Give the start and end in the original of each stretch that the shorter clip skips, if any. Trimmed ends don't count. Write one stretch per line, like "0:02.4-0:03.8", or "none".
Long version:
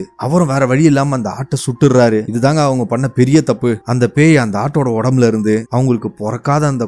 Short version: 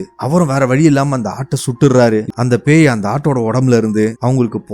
0:02.3-0:03.8